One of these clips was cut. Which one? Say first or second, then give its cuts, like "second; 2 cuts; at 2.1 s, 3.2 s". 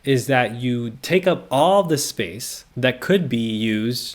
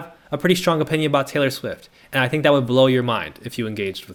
first; 1 cut; at 0.9 s